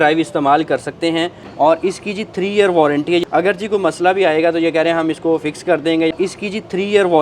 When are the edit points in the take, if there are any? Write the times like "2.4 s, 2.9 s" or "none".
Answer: 1.4 s, 3.2 s, 6.1 s